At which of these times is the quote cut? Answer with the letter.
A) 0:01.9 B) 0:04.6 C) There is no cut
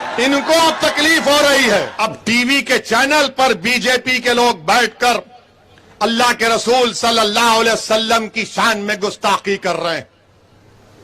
A